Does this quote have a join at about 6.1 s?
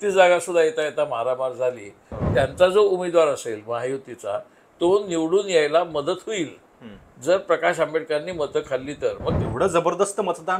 no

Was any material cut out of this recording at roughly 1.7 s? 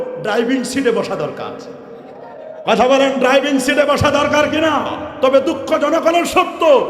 no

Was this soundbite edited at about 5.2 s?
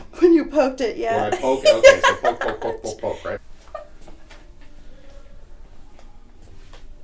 no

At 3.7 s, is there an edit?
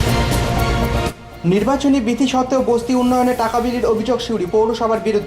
no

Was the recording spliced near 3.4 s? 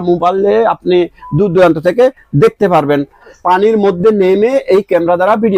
yes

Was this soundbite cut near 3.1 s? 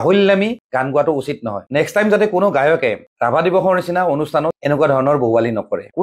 no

